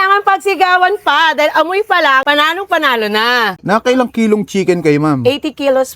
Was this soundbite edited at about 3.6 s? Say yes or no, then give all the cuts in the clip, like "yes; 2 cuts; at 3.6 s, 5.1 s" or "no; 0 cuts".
yes; 1 cut; at 3.6 s